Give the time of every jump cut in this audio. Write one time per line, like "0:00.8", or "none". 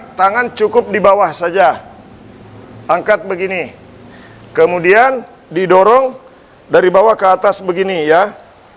none